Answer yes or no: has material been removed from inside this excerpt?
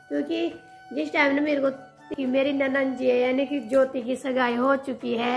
yes